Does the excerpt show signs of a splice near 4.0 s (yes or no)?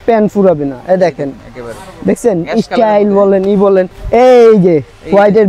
yes